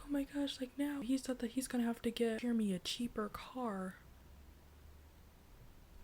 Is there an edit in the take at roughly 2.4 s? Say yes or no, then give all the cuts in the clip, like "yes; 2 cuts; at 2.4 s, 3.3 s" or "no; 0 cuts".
yes; 2 cuts; at 1.0 s, 2.4 s